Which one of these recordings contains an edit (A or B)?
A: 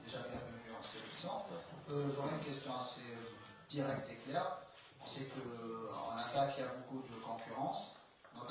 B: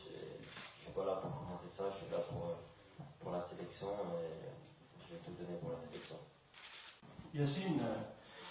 B